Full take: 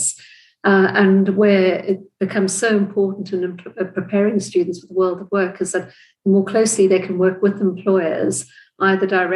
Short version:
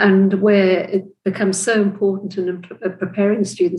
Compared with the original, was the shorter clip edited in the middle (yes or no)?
no